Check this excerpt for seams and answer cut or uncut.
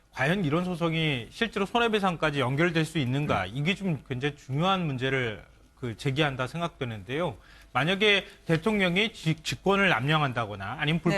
cut